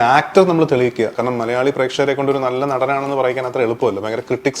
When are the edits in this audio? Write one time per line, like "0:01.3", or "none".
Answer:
0:01.1